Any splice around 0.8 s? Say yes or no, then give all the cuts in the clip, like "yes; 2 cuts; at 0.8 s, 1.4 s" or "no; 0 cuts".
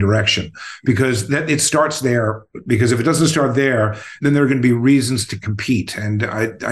no; 0 cuts